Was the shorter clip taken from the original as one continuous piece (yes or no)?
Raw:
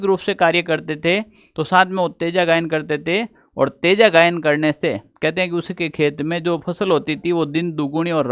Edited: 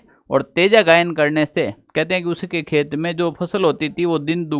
yes